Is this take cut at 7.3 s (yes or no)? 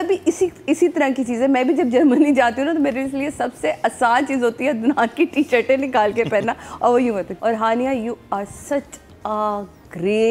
yes